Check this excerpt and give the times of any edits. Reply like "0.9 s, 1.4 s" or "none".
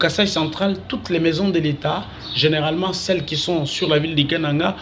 none